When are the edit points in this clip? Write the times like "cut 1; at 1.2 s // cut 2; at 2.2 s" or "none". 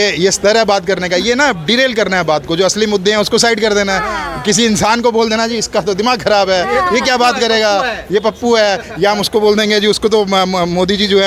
none

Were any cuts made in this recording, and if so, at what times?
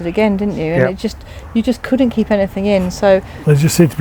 none

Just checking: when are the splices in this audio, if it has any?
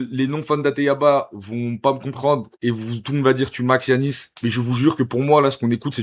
none

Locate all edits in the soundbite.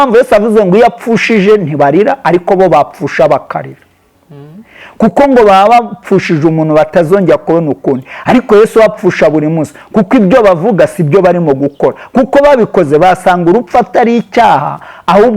none

